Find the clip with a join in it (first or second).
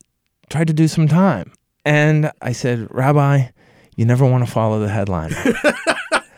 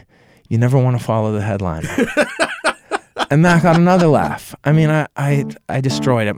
first